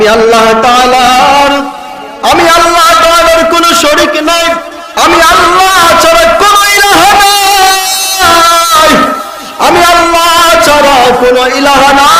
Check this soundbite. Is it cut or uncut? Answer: uncut